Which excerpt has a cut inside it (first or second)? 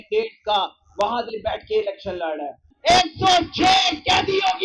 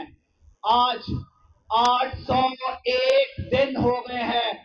first